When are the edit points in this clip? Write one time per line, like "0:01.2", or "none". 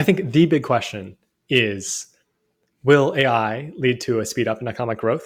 none